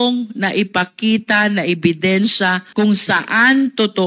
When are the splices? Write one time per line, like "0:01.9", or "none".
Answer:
0:02.6